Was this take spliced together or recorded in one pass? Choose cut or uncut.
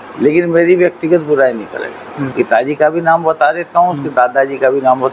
cut